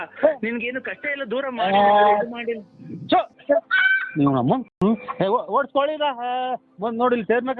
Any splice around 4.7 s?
no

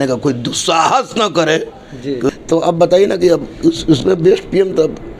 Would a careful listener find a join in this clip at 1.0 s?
no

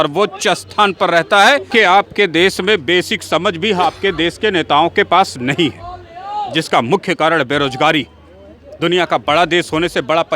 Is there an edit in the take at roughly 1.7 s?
yes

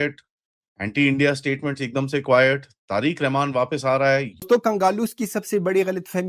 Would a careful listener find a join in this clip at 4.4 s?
yes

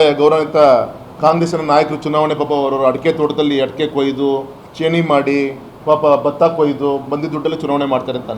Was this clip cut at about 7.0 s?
no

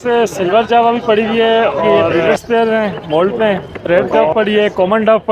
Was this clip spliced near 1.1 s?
no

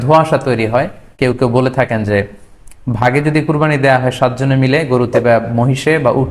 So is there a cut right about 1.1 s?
yes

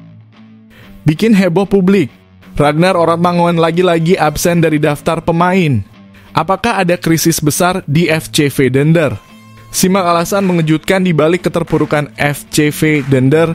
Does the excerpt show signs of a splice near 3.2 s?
no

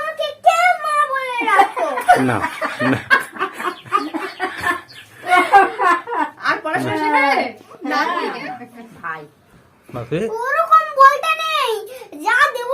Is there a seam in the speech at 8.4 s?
yes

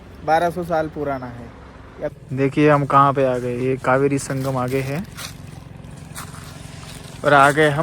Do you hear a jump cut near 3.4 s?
no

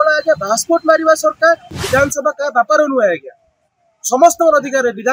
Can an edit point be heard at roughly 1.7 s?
yes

